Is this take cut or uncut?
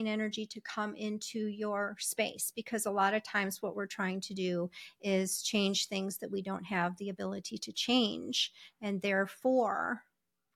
uncut